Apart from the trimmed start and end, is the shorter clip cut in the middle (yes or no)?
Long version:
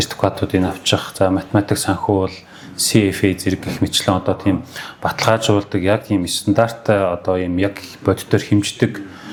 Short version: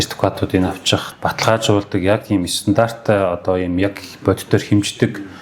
yes